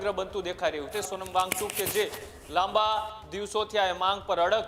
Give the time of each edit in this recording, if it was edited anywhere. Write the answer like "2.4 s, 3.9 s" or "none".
0.9 s